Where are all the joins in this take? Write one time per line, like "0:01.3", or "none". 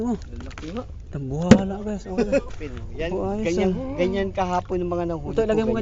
0:02.5